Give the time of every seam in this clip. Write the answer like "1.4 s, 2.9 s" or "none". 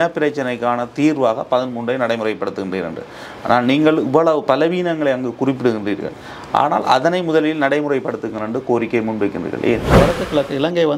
9.9 s